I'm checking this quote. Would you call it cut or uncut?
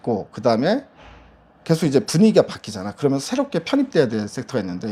uncut